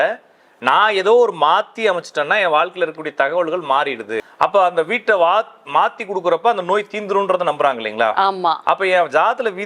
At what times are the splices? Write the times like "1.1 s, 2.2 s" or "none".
4.2 s